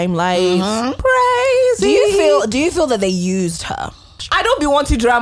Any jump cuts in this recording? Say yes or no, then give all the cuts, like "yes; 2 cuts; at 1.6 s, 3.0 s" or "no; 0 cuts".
yes; 2 cuts; at 1.0 s, 4.2 s